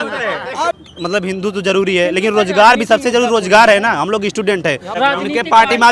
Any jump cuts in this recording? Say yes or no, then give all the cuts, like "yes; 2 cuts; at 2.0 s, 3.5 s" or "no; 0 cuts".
yes; 2 cuts; at 0.8 s, 4.9 s